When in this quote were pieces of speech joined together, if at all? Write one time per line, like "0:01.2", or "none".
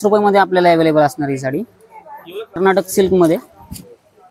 0:02.6